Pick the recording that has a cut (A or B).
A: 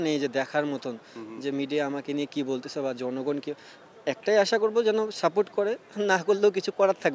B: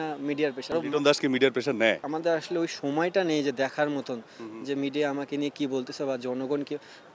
B